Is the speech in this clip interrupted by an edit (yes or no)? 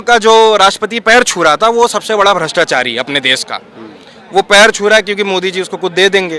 no